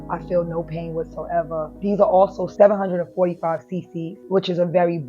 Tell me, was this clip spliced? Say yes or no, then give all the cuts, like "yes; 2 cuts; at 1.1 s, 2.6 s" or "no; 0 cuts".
yes; 3 cuts; at 1.7 s, 2.5 s, 4.2 s